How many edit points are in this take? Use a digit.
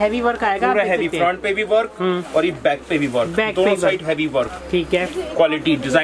0